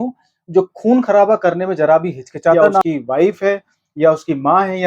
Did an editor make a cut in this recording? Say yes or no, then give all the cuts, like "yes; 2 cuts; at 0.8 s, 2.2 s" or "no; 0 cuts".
yes; 1 cut; at 2.8 s